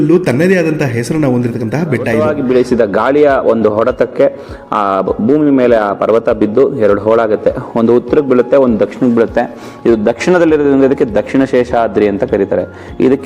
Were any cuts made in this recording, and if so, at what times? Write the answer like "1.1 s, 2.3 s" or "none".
2.2 s